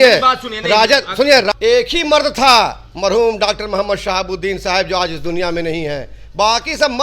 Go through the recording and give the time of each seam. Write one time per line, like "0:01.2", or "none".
0:01.5

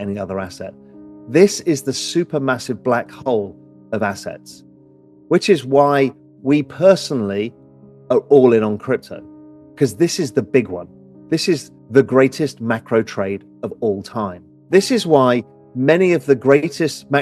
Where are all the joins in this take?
0:11.7
0:14.5

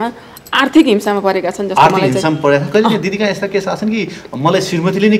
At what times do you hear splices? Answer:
none

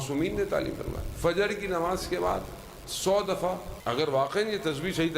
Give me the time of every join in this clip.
0:03.7

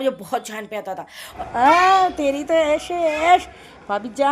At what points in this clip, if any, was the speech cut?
0:01.2

